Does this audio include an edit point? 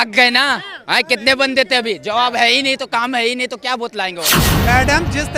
yes; 1 cut; at 4.4 s

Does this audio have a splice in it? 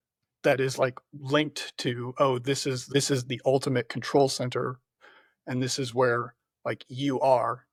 no; 0 cuts

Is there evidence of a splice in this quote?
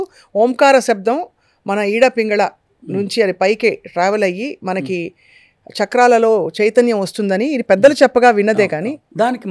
no; 0 cuts

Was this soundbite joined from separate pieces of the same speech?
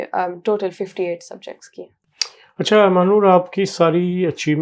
no; 0 cuts

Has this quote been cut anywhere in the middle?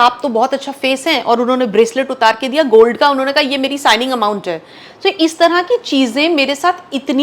no; 0 cuts

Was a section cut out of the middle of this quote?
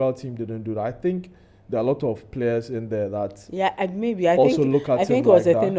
no; 0 cuts

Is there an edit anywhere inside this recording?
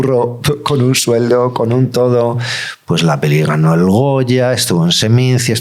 yes; 1 cut; at 2.5 s

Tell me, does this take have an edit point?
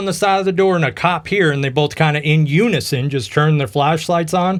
no; 0 cuts

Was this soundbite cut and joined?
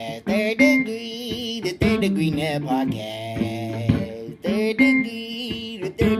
no; 0 cuts

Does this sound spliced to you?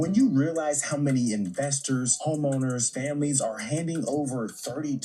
yes; 1 cut; at 4.0 s

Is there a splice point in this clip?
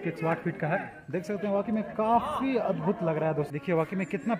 yes; 1 cut; at 3.5 s

